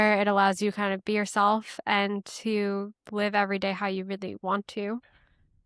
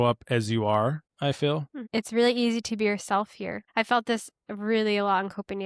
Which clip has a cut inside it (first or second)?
second